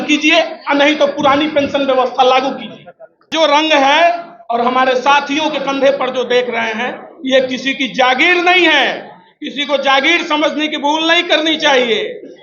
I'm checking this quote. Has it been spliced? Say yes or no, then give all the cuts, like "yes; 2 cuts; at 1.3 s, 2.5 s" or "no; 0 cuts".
yes; 1 cut; at 3.3 s